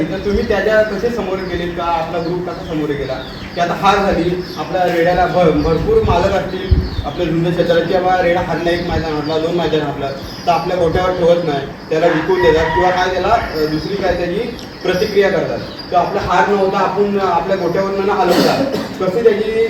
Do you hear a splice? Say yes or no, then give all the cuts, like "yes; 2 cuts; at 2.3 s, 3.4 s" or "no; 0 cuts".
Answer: no; 0 cuts